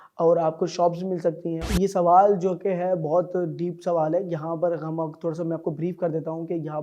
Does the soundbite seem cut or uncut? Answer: cut